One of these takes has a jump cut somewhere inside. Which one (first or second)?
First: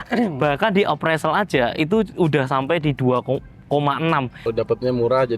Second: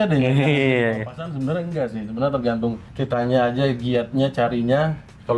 first